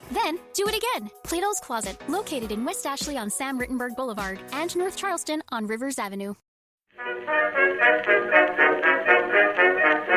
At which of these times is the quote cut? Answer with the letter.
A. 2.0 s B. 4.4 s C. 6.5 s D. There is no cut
C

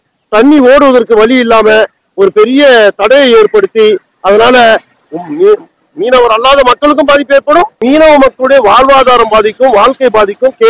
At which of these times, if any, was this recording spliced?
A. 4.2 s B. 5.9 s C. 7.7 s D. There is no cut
C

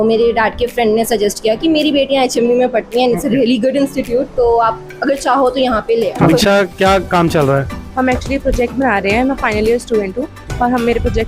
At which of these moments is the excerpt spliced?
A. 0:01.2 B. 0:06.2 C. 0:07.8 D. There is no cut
B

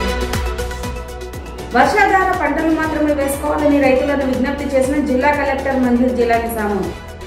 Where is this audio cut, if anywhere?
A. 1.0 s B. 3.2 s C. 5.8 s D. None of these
A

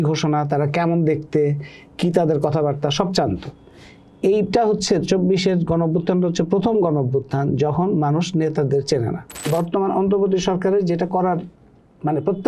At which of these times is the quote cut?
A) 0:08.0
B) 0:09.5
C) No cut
B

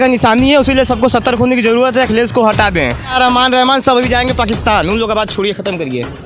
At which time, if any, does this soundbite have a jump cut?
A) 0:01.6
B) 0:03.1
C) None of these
B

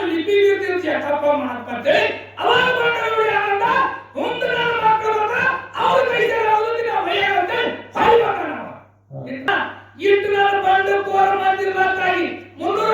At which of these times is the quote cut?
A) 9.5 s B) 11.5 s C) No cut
A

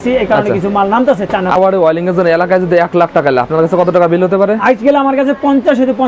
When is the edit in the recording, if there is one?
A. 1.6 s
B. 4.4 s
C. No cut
A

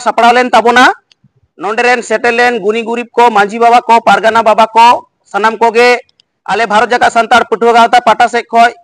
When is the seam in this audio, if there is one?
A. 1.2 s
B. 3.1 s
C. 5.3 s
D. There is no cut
C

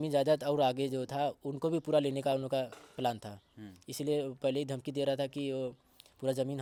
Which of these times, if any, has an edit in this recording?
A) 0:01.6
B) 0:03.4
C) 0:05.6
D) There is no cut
D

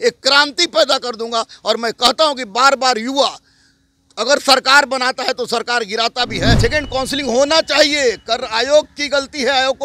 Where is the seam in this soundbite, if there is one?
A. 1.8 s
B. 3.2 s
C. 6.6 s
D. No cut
C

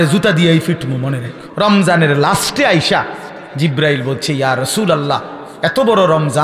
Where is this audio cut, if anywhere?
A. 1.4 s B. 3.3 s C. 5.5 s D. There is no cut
A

